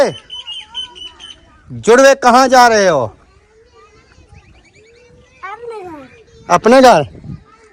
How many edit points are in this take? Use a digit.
0